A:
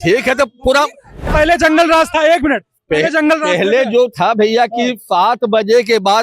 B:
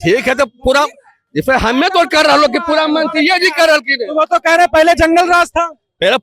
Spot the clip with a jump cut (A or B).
A